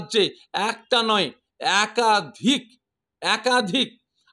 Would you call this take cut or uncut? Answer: uncut